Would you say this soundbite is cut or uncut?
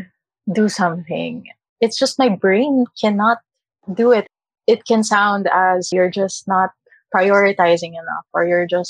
cut